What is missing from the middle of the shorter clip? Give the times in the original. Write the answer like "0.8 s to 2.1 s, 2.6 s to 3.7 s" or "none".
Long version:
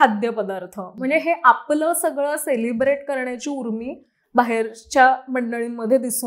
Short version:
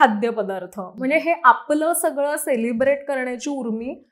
none